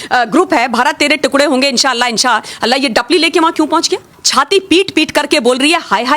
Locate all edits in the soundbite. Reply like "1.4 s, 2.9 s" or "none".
4.2 s